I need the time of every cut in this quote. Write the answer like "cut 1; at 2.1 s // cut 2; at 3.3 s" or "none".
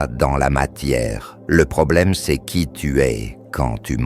cut 1; at 1.3 s